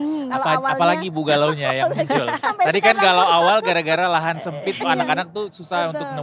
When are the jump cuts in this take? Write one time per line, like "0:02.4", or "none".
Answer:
none